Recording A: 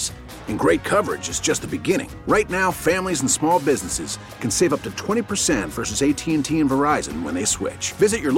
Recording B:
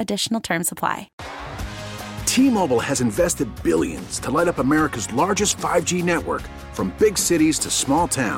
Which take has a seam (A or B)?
B